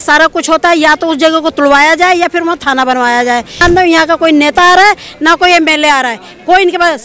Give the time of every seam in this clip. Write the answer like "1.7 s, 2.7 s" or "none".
3.6 s